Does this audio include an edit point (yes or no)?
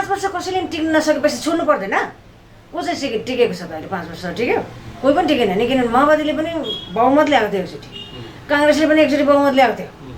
no